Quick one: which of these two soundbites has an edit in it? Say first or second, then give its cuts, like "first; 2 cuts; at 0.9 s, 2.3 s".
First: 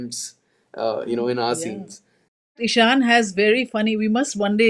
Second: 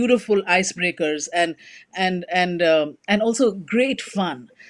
first; 1 cut; at 2.6 s